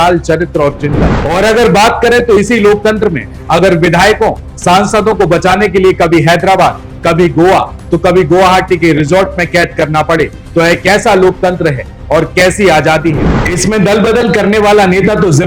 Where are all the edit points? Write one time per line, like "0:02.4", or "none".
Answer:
0:01.2